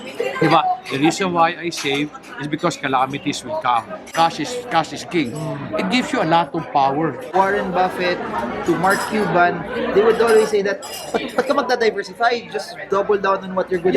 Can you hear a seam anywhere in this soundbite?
yes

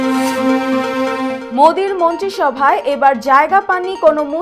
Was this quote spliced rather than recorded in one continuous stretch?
no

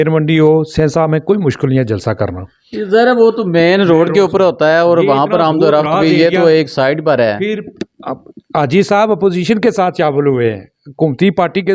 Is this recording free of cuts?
yes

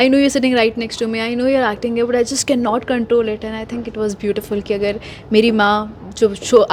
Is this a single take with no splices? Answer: yes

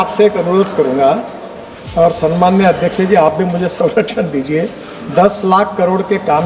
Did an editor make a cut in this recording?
no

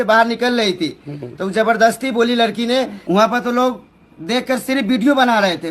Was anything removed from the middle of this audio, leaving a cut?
yes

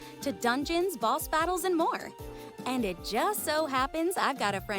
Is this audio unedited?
no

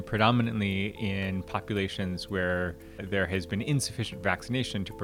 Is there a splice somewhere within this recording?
yes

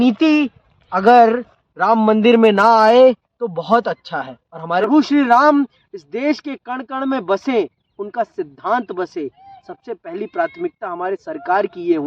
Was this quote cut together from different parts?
yes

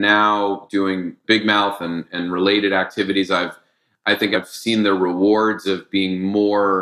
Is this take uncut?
no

